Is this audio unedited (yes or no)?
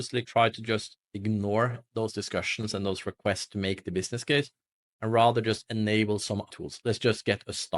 no